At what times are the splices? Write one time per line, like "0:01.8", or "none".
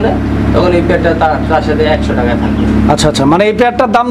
none